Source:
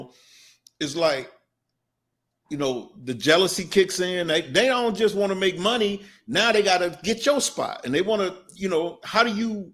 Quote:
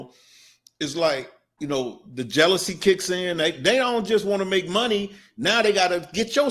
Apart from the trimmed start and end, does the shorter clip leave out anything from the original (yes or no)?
yes